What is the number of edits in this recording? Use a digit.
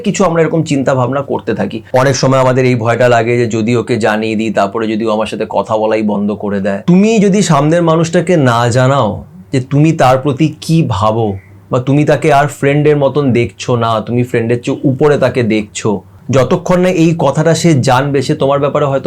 3